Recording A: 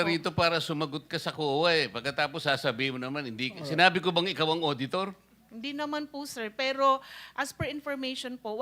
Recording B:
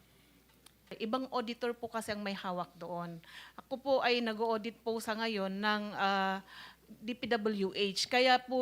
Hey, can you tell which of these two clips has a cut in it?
B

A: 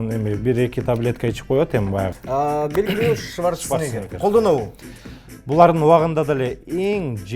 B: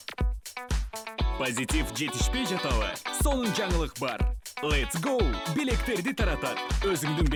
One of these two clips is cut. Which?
A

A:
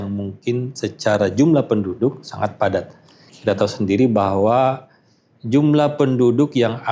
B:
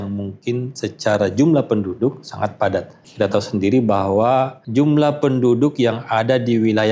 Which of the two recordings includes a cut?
B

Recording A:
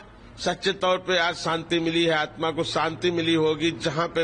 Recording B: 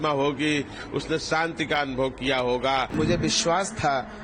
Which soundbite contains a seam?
B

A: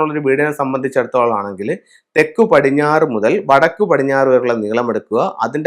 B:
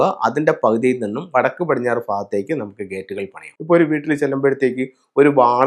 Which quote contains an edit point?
B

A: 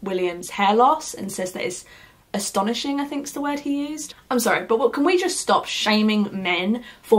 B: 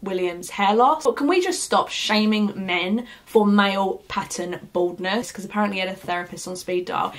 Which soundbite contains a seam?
B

